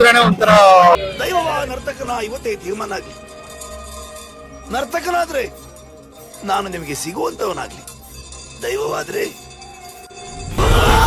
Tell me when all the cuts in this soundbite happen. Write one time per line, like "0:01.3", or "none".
0:00.9